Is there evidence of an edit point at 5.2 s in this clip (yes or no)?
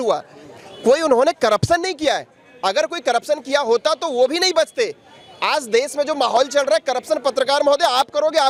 no